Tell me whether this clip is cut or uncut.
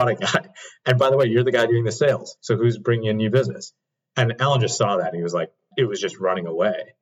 cut